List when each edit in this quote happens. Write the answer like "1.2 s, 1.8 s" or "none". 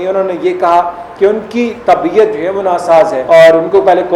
3.2 s

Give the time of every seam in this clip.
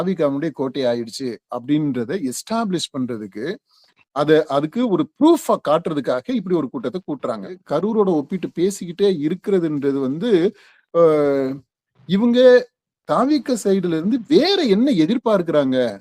7.6 s

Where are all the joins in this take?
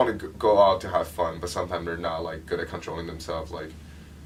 none

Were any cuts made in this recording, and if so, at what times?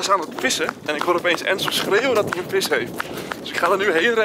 none

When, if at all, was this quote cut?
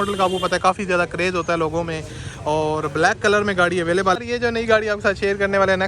4.2 s

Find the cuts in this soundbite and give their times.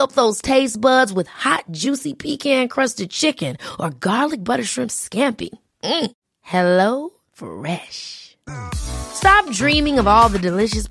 none

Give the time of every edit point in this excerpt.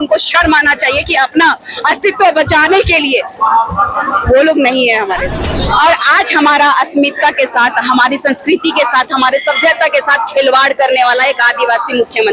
5.3 s

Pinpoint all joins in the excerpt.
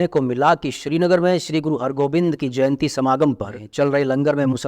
3.6 s

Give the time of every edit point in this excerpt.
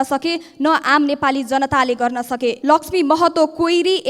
2.6 s

